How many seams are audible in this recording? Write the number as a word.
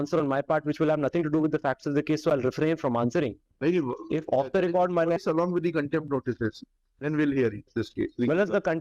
one